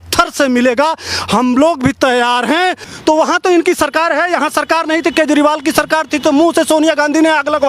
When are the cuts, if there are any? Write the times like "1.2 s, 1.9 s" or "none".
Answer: 2.8 s